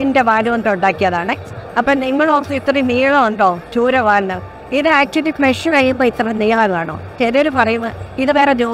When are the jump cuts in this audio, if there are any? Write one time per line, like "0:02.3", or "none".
0:07.1